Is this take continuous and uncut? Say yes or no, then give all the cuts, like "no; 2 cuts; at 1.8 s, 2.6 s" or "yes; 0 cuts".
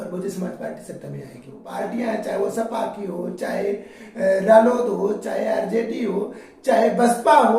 no; 1 cut; at 1.6 s